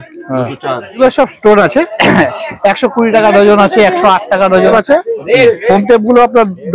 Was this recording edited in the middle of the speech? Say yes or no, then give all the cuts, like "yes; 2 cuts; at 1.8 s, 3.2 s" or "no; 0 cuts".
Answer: yes; 2 cuts; at 1.0 s, 4.7 s